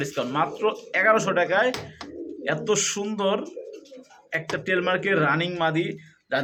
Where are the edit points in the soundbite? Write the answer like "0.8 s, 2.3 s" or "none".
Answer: none

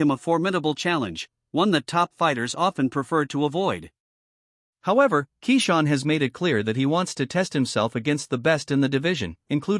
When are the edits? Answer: 6.1 s

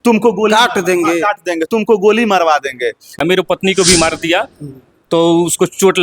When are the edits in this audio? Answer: 3.2 s

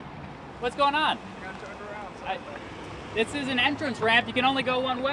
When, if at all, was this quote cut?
none

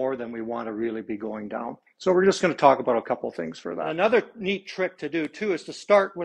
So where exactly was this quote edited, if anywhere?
3.8 s

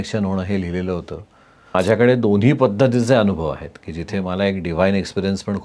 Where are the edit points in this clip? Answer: 1.7 s

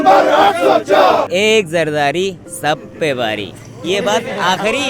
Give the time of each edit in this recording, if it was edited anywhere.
1.3 s

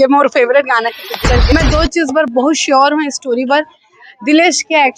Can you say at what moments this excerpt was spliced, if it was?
1.5 s

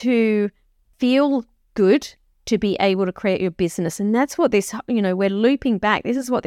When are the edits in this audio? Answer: none

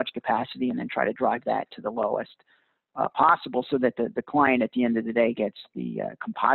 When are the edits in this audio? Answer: none

